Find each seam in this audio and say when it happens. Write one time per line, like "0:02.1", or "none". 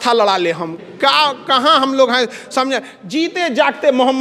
none

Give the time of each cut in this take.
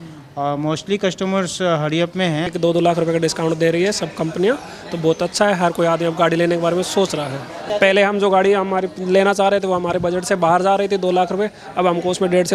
0:02.5
0:07.5

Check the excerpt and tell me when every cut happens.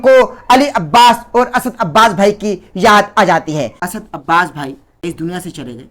0:03.8
0:05.0

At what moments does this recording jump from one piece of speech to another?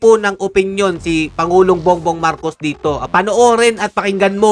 0:03.0

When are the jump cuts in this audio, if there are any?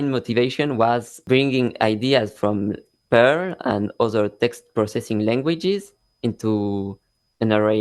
0:01.1

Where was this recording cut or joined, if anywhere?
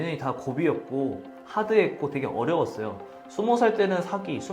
none

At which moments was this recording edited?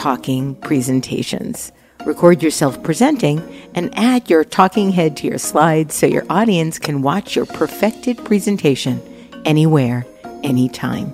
none

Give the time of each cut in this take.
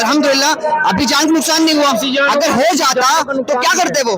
none

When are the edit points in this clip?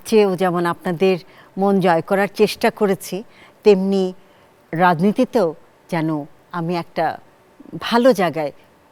none

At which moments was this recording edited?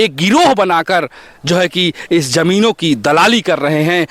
none

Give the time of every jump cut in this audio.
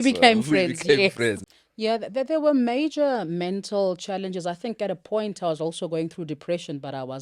0:01.4

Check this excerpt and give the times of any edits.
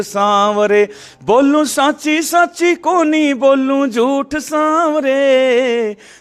none

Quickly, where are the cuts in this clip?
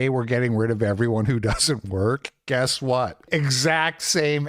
0:03.2

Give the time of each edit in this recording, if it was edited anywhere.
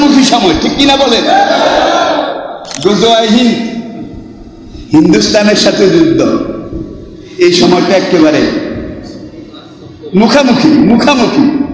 none

